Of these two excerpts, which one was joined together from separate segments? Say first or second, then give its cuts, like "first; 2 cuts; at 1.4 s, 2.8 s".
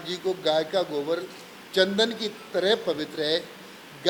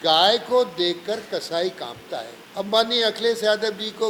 second; 1 cut; at 2.4 s